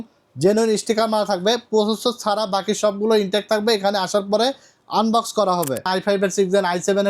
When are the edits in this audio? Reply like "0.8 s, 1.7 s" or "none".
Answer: 5.9 s